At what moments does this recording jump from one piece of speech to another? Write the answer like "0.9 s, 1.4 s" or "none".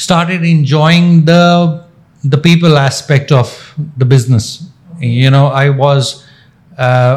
none